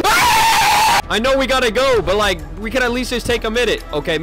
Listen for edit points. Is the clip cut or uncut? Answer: cut